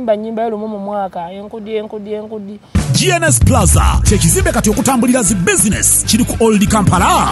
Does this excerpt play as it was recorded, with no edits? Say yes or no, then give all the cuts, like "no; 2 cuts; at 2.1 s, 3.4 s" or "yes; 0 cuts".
no; 1 cut; at 2.6 s